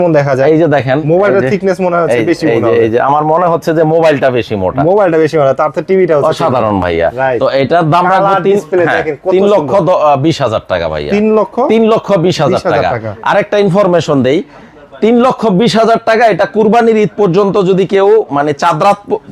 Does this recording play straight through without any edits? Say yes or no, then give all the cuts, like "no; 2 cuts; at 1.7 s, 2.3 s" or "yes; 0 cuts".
yes; 0 cuts